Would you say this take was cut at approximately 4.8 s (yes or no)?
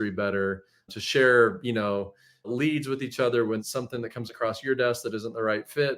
no